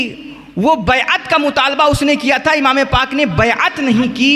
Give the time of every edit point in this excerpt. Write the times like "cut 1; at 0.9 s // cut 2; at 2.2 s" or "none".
none